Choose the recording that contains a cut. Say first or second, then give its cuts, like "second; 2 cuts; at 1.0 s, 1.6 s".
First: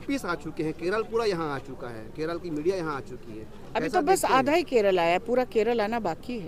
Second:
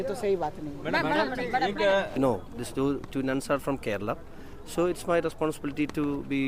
second; 1 cut; at 2.1 s